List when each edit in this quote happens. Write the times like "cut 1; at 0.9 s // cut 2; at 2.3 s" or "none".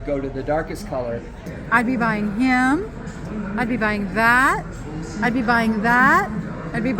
cut 1; at 1.4 s